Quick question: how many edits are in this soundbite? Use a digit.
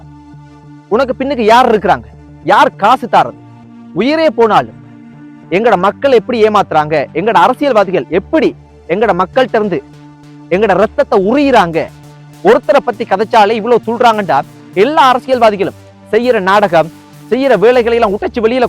2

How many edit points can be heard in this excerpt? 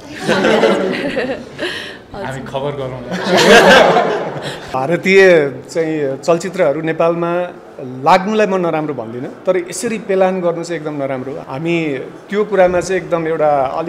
2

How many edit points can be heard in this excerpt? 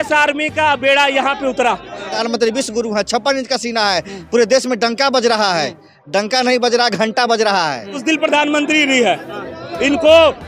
2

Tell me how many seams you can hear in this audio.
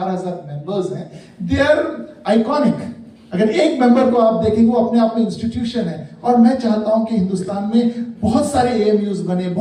0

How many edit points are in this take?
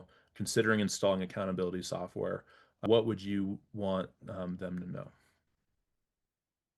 1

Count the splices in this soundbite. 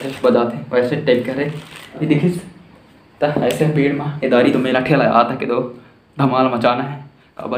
1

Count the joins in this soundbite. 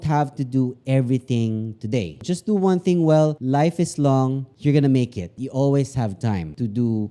0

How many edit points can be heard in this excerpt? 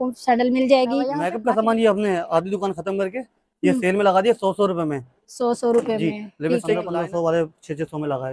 2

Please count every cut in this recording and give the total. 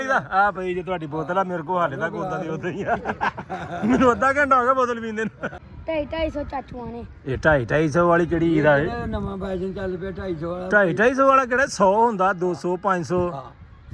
1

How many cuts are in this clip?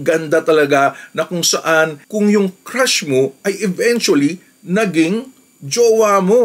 0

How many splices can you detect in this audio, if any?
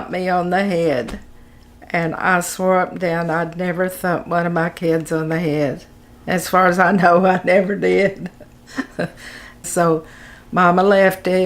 1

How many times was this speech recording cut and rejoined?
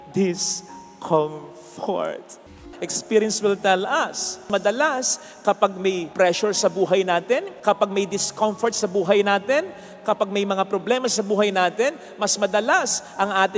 4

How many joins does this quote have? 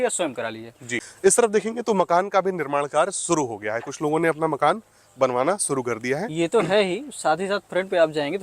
1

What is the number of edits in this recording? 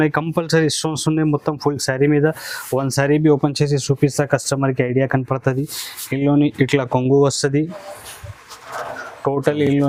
0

